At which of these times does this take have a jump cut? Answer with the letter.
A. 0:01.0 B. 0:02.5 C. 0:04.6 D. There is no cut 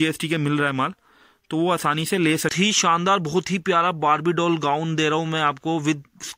B